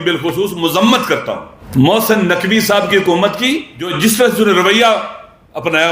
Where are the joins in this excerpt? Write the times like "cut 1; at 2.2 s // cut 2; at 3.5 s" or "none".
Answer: cut 1; at 1.5 s // cut 2; at 3.9 s

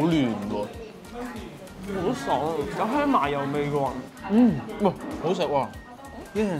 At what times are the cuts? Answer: none

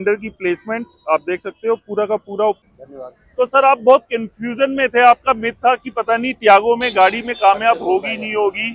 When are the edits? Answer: cut 1; at 2.7 s

